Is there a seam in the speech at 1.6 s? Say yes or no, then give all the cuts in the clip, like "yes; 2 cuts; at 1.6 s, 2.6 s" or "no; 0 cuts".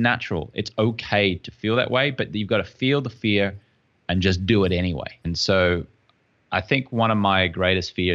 no; 1 cut; at 5.1 s